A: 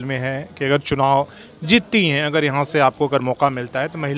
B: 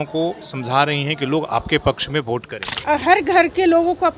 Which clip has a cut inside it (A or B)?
B